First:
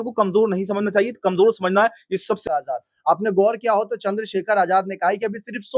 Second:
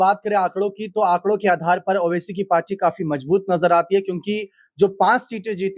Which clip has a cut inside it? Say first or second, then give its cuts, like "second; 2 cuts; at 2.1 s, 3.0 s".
first; 1 cut; at 2.5 s